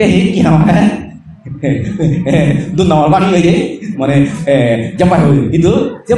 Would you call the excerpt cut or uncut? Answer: uncut